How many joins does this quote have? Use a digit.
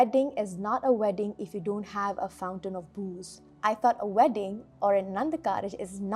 1